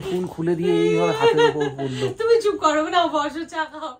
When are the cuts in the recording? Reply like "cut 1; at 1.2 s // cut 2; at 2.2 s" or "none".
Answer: none